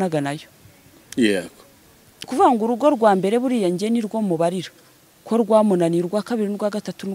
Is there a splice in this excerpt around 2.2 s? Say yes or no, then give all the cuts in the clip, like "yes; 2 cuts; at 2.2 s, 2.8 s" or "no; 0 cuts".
yes; 1 cut; at 2.2 s